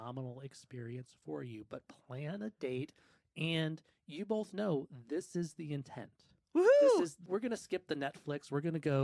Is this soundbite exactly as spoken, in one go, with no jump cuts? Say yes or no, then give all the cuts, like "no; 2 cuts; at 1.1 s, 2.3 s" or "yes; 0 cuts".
no; 1 cut; at 7.3 s